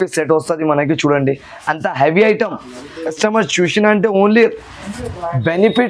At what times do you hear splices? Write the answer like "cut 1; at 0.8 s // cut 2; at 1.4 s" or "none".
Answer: cut 1; at 3.0 s